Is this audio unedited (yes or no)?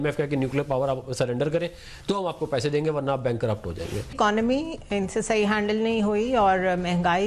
no